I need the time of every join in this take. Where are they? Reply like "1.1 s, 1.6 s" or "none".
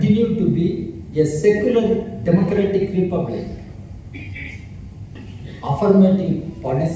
5.1 s